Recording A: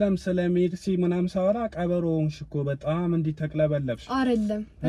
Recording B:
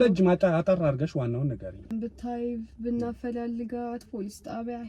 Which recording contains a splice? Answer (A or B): B